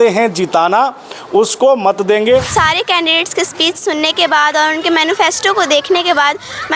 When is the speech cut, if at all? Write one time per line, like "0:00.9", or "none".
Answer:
0:02.5